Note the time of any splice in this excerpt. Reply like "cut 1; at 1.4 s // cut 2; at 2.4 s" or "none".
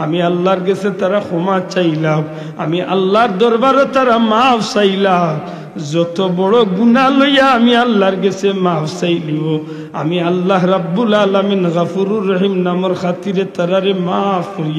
none